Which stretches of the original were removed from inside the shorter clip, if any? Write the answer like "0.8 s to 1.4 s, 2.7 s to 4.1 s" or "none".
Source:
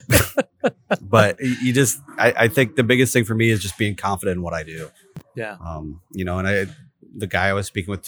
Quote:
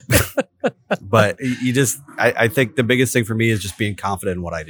none